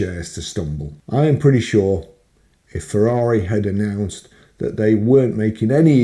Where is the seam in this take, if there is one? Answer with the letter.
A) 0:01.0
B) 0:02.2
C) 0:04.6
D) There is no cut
A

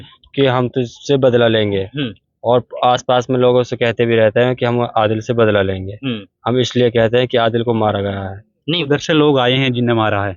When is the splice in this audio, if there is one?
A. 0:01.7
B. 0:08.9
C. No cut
B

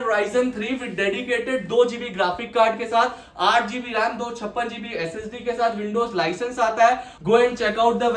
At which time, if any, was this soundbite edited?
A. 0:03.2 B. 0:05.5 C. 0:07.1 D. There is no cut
C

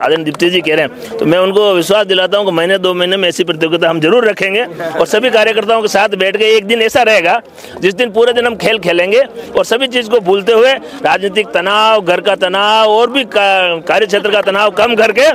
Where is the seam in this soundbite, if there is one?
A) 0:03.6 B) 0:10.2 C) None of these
C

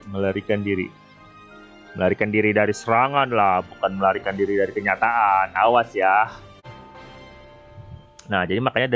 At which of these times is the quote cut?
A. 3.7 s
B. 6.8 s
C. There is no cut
B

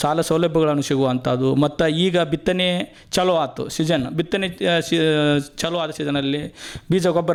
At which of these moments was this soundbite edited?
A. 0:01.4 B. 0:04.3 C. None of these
C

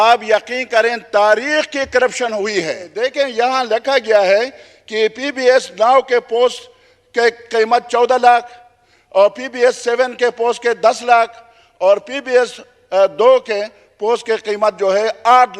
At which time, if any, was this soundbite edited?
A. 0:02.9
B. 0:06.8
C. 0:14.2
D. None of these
A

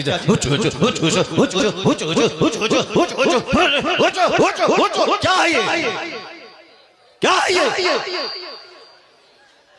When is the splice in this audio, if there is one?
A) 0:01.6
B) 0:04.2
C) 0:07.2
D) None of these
A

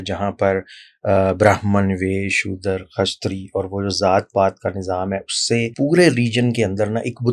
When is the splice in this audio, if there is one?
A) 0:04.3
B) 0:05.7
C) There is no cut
B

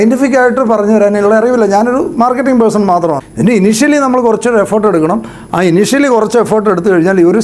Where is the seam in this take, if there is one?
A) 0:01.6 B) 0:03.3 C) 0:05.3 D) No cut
B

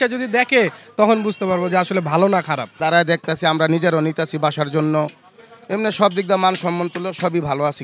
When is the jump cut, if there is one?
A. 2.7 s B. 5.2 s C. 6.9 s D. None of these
A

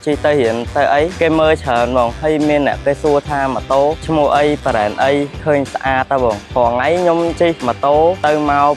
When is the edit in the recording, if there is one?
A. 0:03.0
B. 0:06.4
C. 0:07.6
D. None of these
B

